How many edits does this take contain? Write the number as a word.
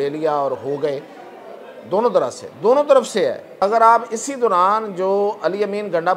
one